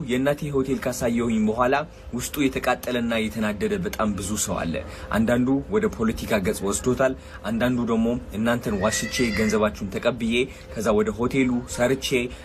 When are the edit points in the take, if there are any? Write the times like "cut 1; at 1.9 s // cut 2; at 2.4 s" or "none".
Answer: none